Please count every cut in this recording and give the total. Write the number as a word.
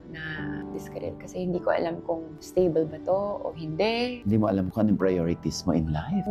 zero